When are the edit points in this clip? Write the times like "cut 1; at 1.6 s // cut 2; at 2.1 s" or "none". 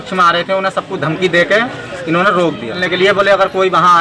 cut 1; at 2.8 s